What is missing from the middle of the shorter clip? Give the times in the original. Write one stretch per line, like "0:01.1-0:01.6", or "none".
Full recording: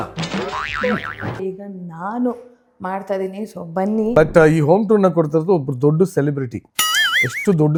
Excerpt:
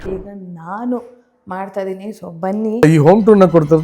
0:04.2-0:04.5